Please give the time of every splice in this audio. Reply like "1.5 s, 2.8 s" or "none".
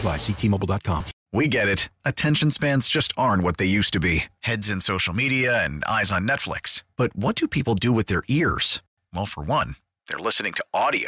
1.2 s